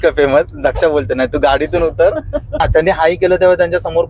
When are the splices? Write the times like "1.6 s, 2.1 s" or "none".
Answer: 2.6 s